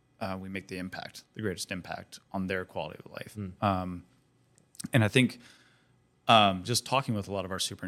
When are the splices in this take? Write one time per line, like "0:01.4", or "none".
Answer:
none